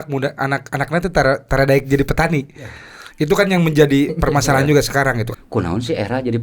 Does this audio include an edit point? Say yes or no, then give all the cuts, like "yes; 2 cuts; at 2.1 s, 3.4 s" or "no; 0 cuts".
yes; 1 cut; at 5.3 s